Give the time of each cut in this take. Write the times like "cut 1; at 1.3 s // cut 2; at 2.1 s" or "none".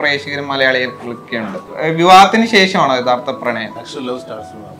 cut 1; at 1.7 s // cut 2; at 3.9 s